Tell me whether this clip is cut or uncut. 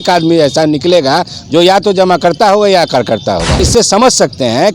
cut